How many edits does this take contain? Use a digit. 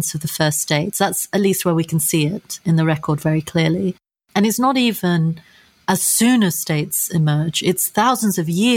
0